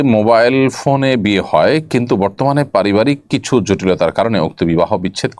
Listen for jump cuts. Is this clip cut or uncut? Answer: uncut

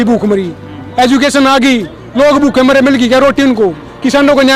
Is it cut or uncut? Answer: uncut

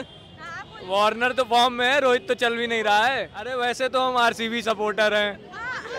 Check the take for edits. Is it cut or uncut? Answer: cut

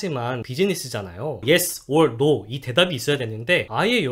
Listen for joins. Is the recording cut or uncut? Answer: cut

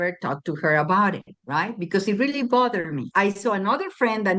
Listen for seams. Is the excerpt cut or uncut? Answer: cut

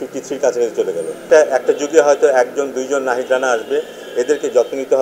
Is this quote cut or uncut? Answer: cut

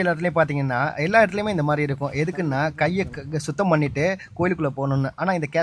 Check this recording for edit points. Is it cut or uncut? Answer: uncut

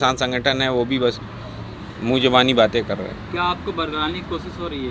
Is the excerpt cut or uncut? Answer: uncut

